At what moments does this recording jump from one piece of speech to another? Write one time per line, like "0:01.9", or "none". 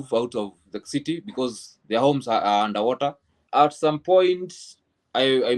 0:03.4